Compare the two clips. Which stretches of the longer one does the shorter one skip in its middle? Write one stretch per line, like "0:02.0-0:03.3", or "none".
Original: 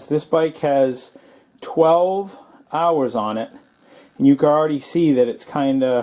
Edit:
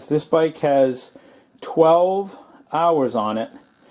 none